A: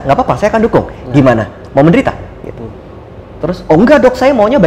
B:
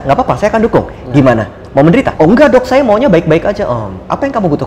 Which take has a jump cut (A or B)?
B